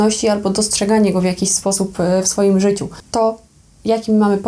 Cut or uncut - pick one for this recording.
cut